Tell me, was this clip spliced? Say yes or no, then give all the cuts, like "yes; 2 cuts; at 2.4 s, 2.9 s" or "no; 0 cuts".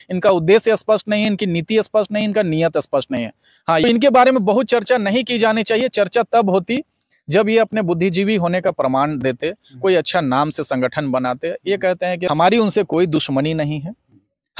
yes; 2 cuts; at 3.8 s, 12.2 s